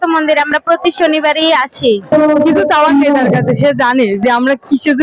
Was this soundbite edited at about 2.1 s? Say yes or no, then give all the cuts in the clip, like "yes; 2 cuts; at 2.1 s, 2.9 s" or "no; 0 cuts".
yes; 1 cut; at 2.1 s